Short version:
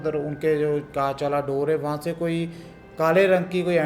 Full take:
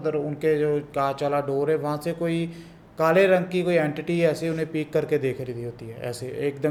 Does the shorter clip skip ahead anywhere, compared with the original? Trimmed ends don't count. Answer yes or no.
no